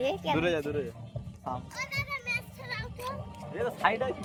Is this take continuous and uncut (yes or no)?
yes